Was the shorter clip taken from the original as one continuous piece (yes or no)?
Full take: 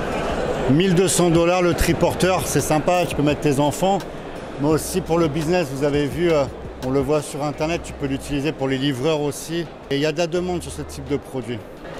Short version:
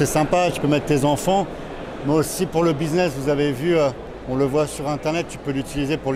yes